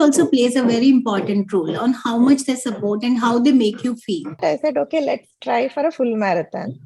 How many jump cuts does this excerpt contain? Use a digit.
1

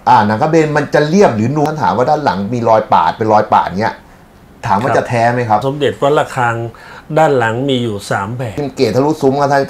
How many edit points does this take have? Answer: 3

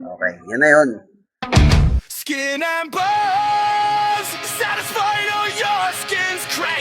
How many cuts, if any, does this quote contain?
1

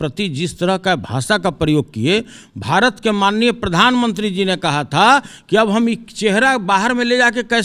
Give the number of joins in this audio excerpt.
0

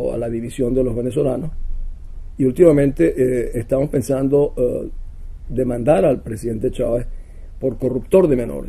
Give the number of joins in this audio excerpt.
1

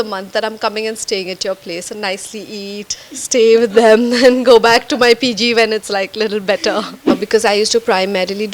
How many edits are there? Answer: 1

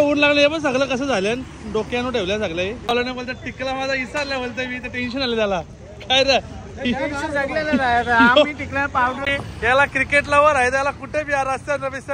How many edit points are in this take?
2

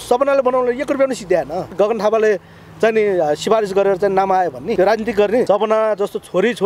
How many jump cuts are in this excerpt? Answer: 3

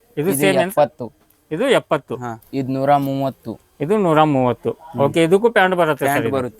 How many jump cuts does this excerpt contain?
1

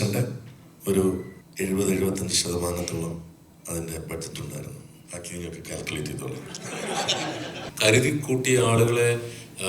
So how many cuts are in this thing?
3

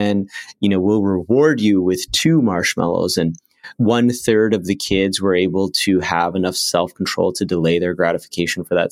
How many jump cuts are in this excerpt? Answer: 1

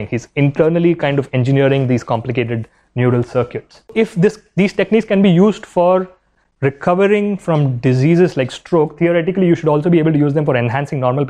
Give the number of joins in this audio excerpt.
1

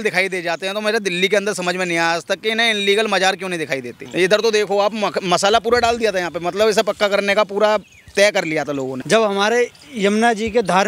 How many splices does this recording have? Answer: 2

